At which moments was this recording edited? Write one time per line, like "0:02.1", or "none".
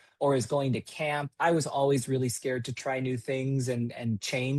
none